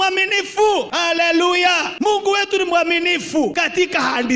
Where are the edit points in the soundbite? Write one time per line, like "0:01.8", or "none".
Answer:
0:00.9
0:01.9
0:03.6